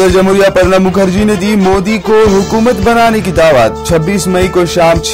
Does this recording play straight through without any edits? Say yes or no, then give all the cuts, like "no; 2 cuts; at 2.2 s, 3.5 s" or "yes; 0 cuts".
yes; 0 cuts